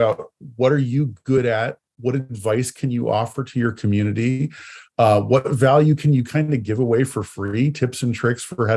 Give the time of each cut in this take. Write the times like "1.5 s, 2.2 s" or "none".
none